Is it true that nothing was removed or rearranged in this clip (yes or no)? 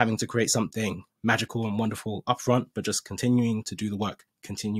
yes